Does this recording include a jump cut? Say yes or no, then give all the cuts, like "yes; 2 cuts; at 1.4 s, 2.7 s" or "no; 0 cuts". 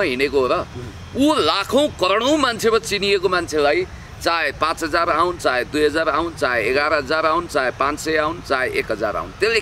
no; 0 cuts